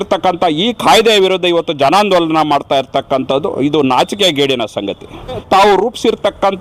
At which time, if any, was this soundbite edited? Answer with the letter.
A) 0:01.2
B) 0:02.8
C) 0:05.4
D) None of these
C